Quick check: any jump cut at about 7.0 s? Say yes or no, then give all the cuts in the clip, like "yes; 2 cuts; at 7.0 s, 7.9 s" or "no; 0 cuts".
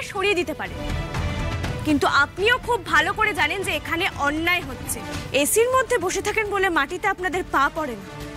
no; 2 cuts; at 1.8 s, 4.9 s